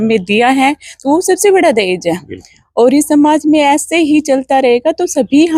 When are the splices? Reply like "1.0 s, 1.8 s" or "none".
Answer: none